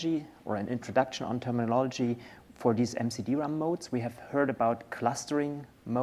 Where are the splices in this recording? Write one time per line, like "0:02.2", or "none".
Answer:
0:01.6